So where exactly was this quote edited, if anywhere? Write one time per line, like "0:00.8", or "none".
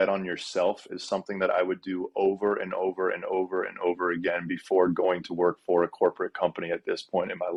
none